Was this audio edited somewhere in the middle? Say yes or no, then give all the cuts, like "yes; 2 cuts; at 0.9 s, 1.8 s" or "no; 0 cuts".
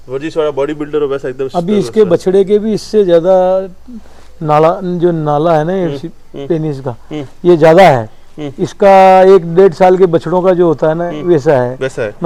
no; 0 cuts